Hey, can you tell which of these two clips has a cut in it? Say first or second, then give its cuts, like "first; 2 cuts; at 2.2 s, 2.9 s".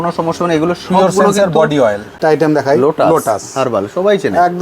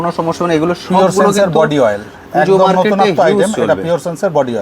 first; 1 cut; at 2.2 s